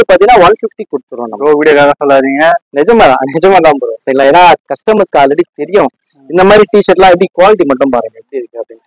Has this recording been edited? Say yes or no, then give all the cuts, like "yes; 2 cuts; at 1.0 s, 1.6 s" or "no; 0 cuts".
no; 0 cuts